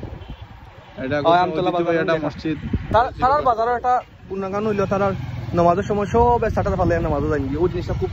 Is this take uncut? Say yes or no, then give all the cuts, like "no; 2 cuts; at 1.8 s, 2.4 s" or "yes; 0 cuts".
no; 1 cut; at 2.8 s